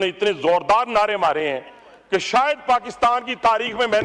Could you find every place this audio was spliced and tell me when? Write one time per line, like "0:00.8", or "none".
none